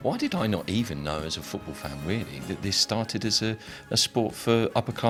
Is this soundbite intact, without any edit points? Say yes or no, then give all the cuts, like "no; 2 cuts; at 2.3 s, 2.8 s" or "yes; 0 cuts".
yes; 0 cuts